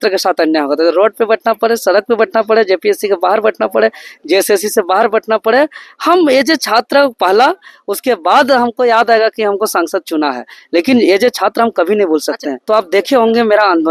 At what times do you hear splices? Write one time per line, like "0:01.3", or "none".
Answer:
0:12.5